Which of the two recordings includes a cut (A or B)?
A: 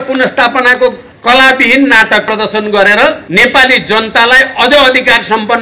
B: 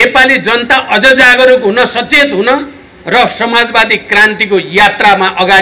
A